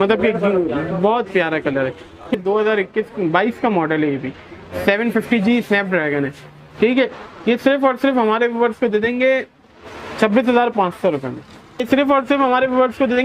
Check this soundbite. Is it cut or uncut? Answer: cut